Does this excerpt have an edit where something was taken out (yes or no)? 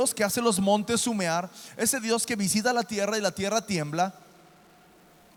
no